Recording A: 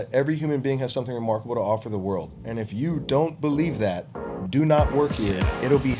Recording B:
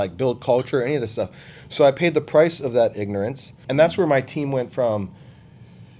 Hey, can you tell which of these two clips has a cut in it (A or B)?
B